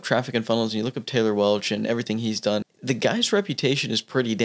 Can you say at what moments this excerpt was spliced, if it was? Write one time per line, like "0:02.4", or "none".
0:02.7